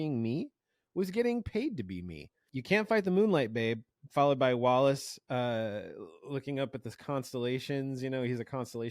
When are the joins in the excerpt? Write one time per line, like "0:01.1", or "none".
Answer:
0:02.5